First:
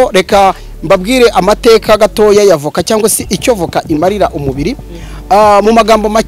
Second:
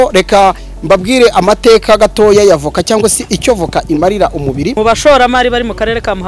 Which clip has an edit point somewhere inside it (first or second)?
second